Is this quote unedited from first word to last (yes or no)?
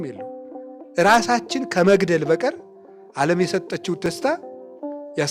no